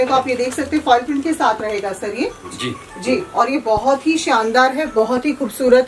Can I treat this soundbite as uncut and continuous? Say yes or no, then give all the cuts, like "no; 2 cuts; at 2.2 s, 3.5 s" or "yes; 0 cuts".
yes; 0 cuts